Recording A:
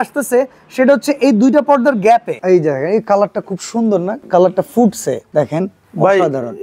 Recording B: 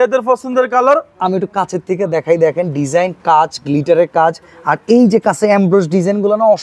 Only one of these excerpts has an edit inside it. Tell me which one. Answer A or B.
A